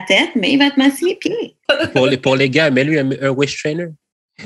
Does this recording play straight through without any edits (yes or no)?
no